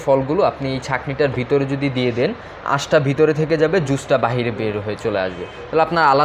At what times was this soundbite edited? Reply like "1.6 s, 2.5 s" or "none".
none